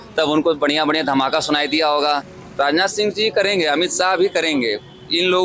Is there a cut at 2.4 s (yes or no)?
yes